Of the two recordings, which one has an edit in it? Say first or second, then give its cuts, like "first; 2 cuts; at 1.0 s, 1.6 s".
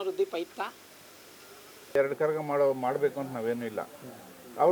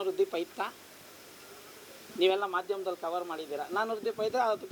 first; 1 cut; at 2.0 s